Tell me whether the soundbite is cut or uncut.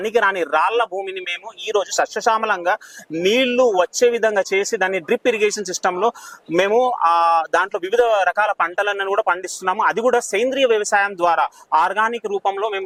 uncut